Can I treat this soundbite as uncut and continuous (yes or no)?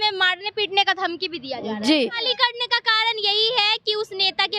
no